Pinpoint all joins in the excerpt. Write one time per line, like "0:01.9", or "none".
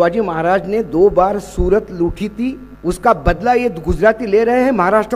0:02.7